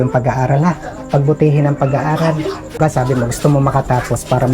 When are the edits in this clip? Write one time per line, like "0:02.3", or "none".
0:02.8